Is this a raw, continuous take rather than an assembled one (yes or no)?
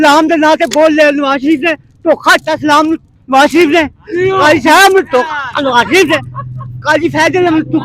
yes